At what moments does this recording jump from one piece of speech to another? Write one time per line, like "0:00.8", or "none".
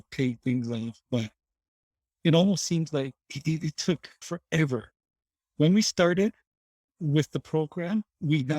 0:04.3

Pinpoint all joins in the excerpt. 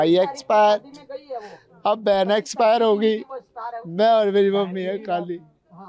none

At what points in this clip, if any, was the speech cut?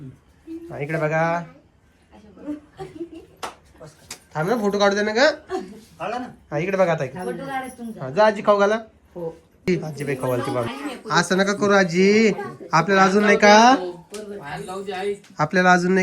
0:10.7

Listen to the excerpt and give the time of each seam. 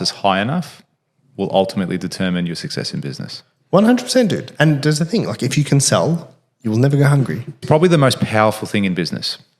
0:07.6

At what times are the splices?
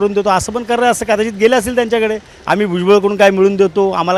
none

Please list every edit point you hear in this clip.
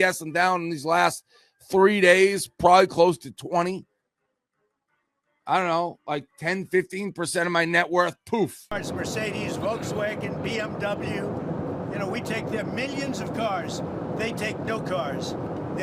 0:08.8

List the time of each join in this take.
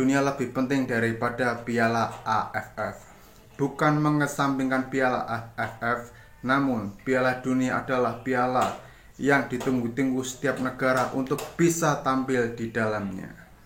none

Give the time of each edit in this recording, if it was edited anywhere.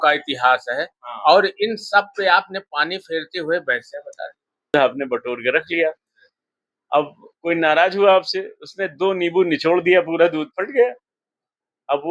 0:04.7

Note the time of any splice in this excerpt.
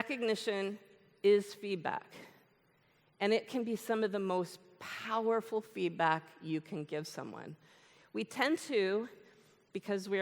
none

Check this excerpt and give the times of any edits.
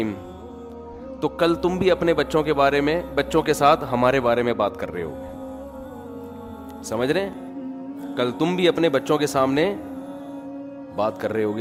none

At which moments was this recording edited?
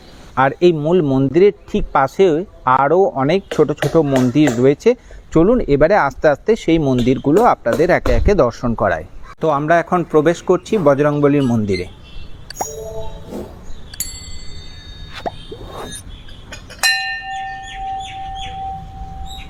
none

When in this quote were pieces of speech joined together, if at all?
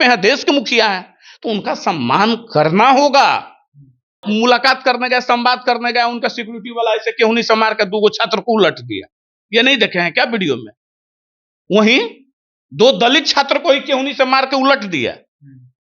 0:04.2

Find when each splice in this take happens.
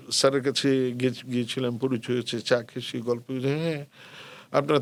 none

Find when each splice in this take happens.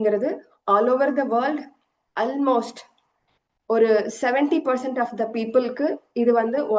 none

